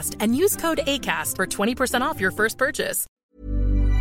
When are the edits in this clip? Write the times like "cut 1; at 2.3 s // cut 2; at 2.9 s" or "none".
cut 1; at 3.0 s